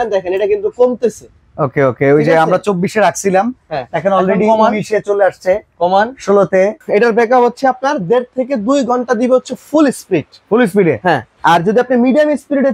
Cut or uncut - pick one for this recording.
cut